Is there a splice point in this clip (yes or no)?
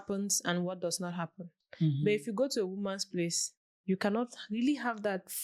no